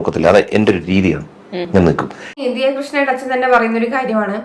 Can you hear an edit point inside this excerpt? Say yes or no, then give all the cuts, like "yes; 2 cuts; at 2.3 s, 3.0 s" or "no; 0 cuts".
no; 0 cuts